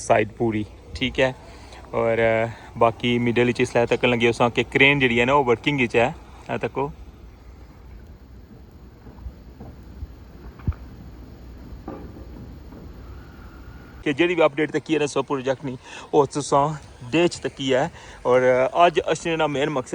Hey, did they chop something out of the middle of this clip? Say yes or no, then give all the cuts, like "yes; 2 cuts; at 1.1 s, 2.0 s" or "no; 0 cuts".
yes; 1 cut; at 14.0 s